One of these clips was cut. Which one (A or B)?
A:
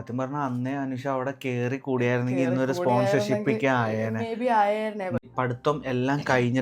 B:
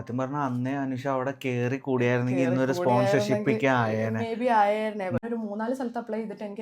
B